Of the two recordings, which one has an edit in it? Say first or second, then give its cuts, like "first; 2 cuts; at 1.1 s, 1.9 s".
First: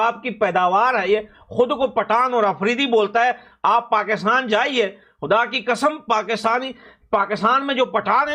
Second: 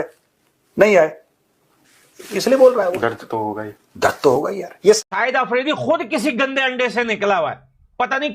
second; 1 cut; at 5.0 s